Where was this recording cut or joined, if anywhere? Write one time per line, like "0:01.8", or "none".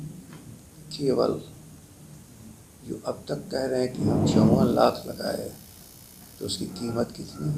none